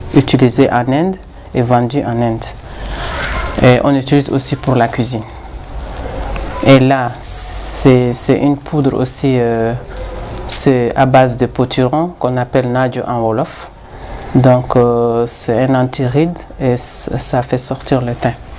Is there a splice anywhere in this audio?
no; 0 cuts

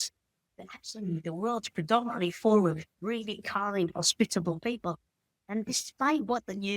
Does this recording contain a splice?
no; 0 cuts

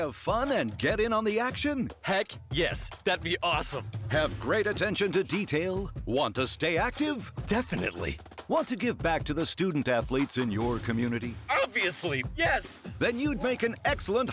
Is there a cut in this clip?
no; 0 cuts

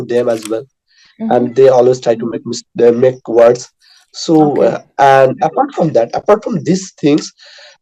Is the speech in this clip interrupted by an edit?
no; 0 cuts

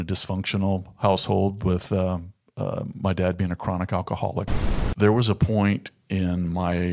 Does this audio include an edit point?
yes; 1 cut; at 4.6 s

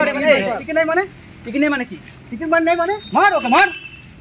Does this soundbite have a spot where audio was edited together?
yes; 1 cut; at 3.0 s

